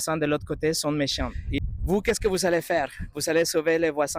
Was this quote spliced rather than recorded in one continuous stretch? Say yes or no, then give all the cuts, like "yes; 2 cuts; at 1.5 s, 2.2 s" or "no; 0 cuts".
yes; 1 cut; at 1.5 s